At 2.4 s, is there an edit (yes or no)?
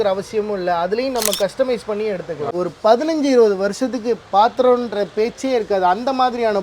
yes